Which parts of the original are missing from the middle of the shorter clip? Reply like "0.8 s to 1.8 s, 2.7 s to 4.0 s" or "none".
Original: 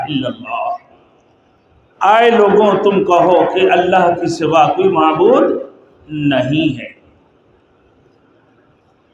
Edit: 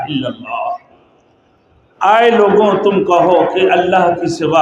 none